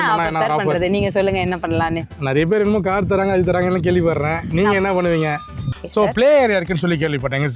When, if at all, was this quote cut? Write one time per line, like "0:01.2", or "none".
0:05.6